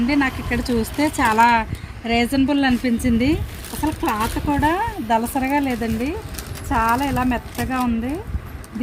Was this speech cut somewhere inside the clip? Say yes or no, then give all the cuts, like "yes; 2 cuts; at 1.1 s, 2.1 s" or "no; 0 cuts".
no; 0 cuts